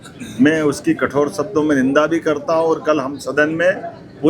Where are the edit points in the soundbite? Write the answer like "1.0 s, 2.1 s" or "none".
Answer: none